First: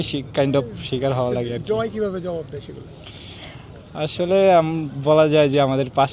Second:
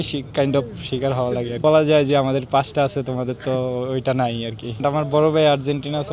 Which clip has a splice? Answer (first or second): second